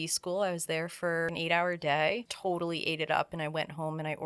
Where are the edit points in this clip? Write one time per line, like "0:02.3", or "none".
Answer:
0:01.3
0:02.3